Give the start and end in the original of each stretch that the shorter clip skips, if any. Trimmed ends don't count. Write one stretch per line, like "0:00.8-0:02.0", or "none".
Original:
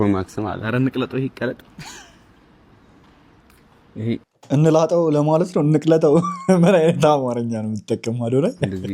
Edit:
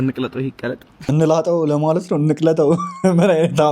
0:01.7-0:04.4